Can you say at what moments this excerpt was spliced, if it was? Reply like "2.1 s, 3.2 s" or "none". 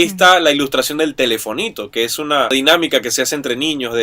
2.5 s